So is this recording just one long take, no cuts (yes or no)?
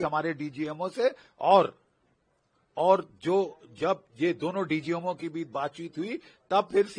yes